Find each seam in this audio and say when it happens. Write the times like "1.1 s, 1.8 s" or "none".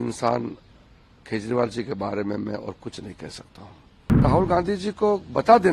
4.2 s